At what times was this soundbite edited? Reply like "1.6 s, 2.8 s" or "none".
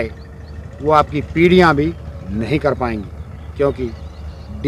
none